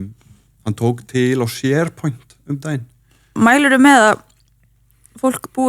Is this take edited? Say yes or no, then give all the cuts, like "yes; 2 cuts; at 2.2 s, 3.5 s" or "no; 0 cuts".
yes; 1 cut; at 3.3 s